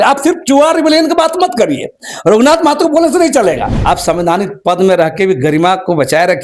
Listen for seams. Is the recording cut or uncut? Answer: cut